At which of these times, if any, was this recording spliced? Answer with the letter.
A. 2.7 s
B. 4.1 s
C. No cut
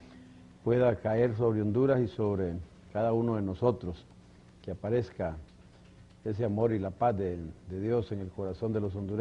B